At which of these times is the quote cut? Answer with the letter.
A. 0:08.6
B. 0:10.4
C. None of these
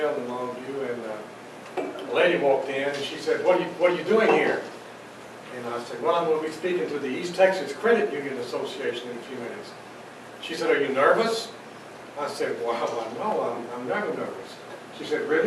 A